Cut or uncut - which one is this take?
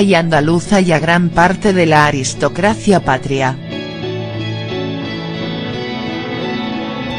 cut